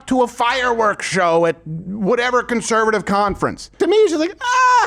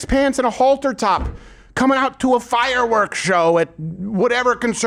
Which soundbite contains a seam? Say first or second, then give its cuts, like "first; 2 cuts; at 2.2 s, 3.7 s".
first; 1 cut; at 3.8 s